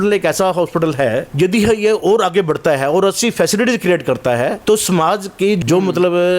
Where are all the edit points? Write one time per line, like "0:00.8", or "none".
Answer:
0:01.3
0:04.6
0:05.6